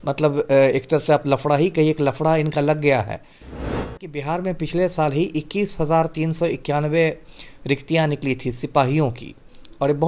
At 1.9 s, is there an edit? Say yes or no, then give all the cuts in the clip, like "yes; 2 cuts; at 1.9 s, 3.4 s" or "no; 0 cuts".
no; 1 cut; at 3.9 s